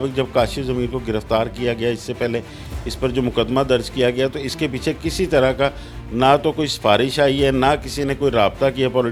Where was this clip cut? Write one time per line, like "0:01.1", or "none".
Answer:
none